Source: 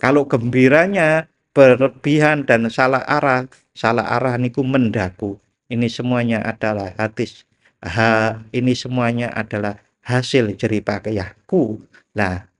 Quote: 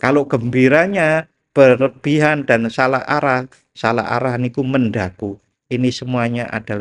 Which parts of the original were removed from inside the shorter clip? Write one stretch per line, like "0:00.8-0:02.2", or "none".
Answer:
0:05.6-0:08.4